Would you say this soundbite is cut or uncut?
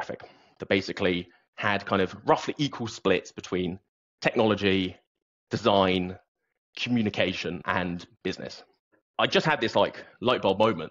cut